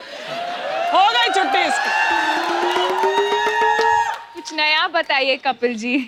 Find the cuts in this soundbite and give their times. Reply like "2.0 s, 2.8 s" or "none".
none